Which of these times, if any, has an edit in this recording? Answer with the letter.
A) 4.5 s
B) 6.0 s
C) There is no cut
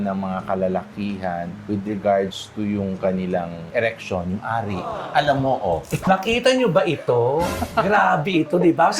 B